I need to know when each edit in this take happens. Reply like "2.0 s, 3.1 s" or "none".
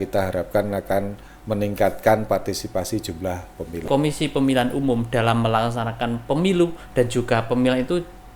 3.9 s